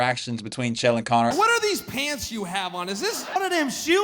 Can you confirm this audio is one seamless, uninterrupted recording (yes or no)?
no